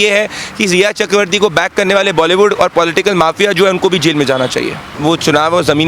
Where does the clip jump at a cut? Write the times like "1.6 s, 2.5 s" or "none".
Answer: 4.9 s